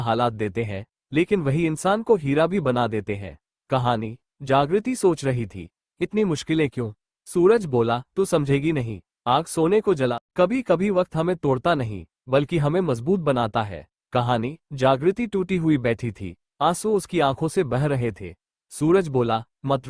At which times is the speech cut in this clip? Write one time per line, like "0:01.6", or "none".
0:10.1